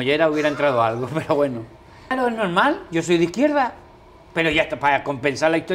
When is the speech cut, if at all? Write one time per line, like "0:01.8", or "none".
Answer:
0:02.1